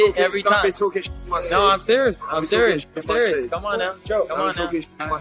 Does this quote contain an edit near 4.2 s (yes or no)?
yes